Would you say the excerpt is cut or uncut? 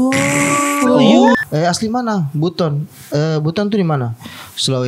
cut